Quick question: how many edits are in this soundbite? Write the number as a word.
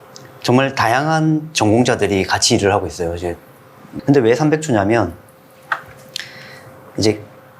one